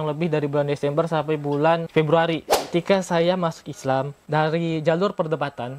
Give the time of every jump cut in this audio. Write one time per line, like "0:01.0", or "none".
0:01.9
0:02.7

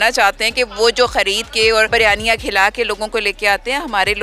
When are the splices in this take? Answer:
none

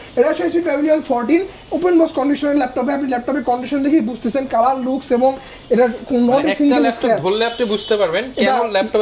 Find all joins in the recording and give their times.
none

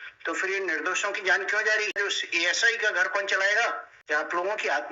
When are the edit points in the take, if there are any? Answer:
0:01.9
0:03.9

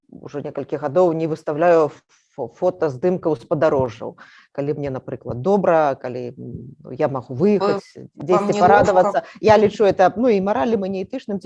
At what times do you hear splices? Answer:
none

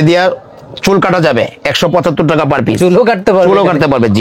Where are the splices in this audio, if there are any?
none

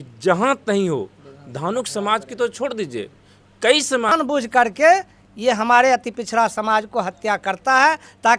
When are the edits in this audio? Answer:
0:04.1

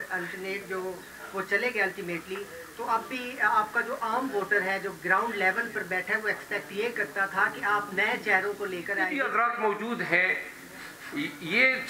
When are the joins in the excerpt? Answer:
0:09.1

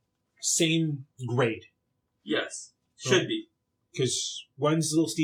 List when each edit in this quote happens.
none

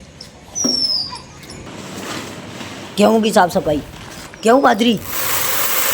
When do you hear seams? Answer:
0:01.7

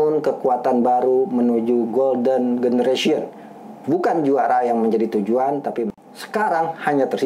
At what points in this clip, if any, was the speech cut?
0:05.9

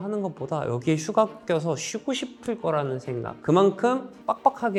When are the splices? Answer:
none

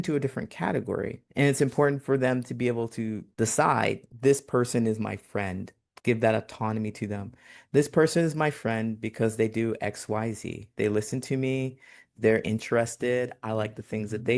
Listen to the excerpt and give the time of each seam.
0:01.2
0:03.2
0:04.1

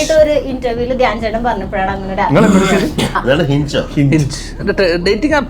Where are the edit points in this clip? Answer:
0:03.2

